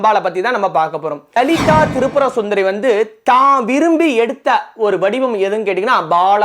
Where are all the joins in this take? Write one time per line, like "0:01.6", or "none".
0:01.4